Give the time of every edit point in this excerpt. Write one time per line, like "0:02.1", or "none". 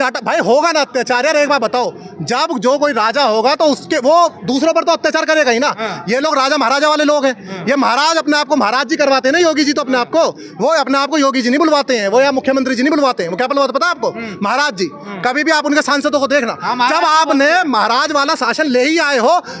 none